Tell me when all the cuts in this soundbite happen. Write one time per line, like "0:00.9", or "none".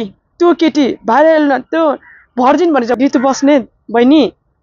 0:02.9